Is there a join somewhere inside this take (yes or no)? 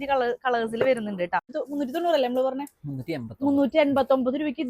yes